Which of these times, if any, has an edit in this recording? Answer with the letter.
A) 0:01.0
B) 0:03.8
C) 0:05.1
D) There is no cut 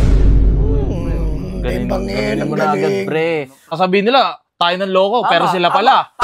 B